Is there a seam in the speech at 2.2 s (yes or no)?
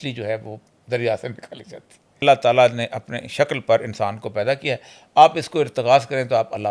yes